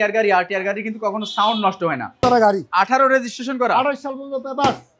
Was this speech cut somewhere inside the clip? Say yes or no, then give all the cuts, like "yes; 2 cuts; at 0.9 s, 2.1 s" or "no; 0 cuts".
yes; 1 cut; at 2.2 s